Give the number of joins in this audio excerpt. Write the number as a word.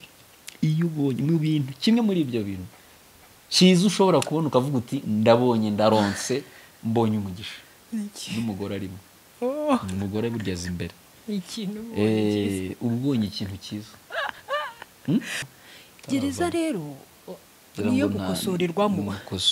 one